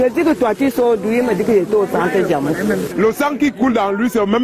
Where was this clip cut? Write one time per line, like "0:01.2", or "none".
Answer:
0:02.9